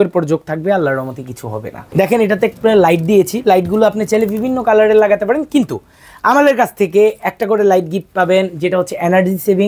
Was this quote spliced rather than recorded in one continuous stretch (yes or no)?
yes